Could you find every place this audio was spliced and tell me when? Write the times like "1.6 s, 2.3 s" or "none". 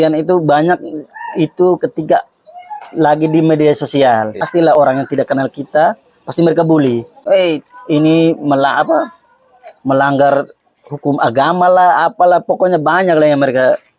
4.7 s, 7.1 s